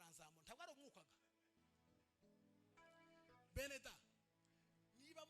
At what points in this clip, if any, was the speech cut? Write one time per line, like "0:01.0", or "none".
0:01.6